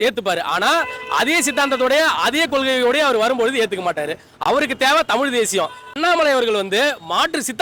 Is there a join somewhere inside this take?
no; 0 cuts

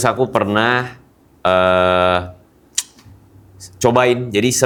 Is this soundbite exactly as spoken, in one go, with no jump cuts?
yes; 0 cuts

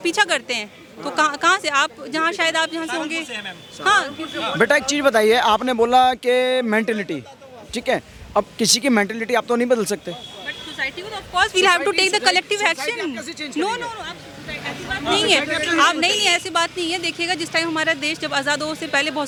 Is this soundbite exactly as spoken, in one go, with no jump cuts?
yes; 0 cuts

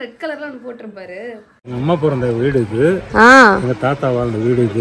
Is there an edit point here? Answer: yes; 1 cut; at 1.5 s

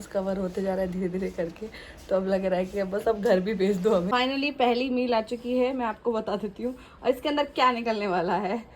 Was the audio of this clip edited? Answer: yes; 1 cut; at 4.1 s

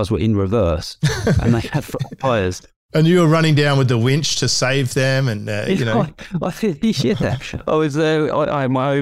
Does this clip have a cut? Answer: yes; 1 cut; at 2.7 s

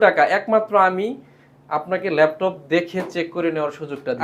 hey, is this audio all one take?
yes; 0 cuts

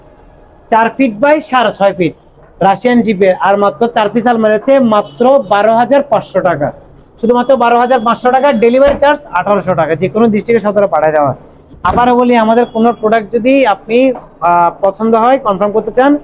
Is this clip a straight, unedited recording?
yes; 0 cuts

